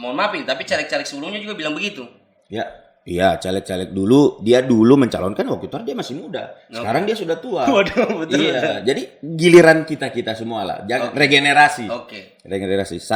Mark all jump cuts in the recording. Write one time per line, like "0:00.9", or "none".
none